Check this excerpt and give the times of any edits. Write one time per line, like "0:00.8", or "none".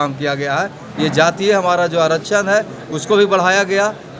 none